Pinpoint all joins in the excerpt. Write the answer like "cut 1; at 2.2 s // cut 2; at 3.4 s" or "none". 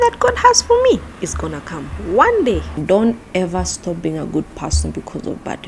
cut 1; at 2.8 s